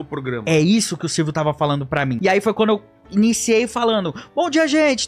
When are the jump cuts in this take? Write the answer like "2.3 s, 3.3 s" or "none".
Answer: 2.1 s

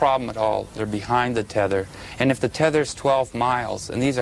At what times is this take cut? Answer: 2.1 s

